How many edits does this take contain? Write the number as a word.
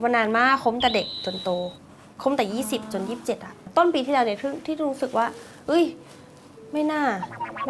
zero